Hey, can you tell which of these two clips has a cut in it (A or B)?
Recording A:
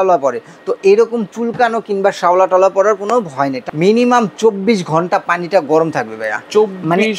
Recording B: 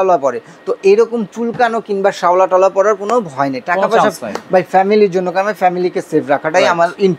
A